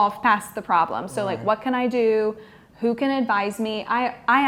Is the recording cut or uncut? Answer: uncut